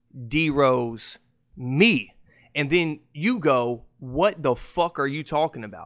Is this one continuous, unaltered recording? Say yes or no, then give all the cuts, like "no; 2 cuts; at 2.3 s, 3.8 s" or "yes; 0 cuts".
yes; 0 cuts